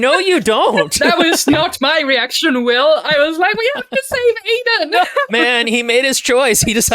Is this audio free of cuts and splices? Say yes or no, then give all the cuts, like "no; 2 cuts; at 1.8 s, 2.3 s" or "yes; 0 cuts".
no; 2 cuts; at 1.5 s, 5.3 s